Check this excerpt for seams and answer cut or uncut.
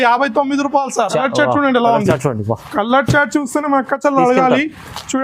cut